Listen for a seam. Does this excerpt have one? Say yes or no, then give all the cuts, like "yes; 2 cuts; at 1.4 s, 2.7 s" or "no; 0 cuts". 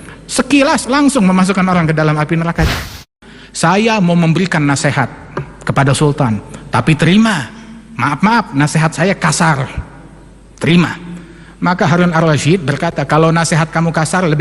yes; 1 cut; at 2.8 s